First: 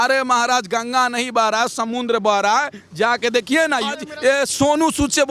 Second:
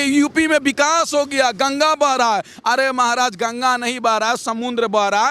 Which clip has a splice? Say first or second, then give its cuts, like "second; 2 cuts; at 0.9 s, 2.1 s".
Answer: first; 1 cut; at 4.0 s